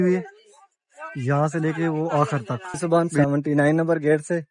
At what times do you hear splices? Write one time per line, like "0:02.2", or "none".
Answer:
0:02.8